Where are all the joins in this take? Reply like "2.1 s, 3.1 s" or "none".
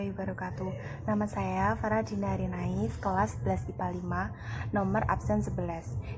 none